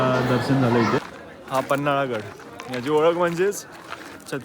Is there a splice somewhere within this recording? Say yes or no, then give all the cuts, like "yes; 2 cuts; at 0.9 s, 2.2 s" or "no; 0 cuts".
yes; 1 cut; at 1.0 s